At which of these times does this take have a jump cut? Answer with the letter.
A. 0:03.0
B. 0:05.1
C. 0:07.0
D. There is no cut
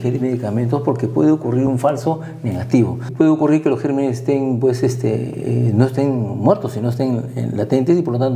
A